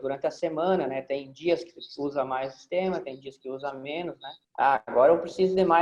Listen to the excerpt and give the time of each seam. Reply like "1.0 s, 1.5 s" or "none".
4.3 s